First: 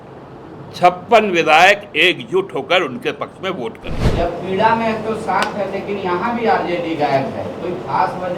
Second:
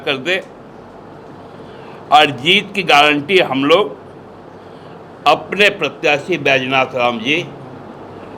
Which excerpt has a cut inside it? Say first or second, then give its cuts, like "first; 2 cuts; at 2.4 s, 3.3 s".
first; 1 cut; at 4.0 s